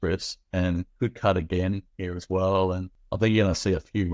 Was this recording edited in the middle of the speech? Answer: yes; 1 cut; at 3.0 s

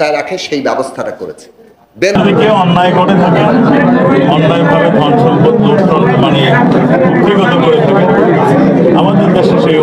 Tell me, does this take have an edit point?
yes; 1 cut; at 2.1 s

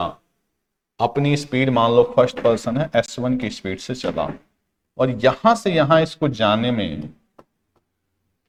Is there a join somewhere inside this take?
no; 0 cuts

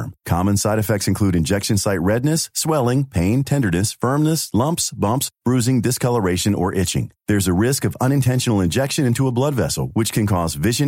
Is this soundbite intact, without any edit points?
yes; 0 cuts

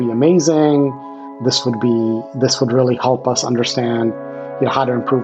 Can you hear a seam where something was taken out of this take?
no; 0 cuts

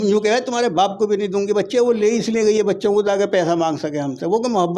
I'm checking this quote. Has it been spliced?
no; 0 cuts

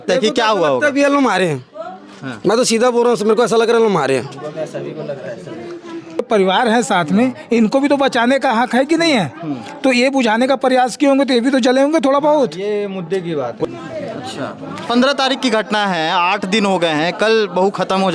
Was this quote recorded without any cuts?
no; 2 cuts; at 6.2 s, 13.7 s

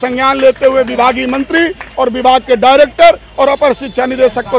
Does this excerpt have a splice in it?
no; 0 cuts

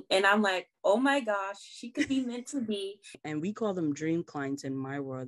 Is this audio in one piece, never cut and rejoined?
no; 1 cut; at 3.2 s

